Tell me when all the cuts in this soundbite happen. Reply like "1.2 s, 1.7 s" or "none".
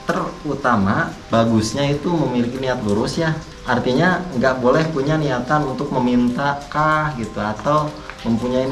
1.2 s, 3.5 s